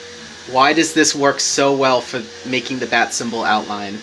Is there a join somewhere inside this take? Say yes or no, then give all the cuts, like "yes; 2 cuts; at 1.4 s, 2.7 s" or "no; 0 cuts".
no; 0 cuts